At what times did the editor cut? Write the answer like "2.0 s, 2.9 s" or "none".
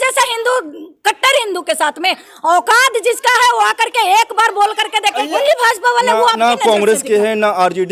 5.4 s